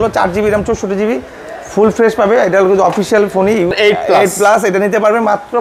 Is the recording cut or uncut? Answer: cut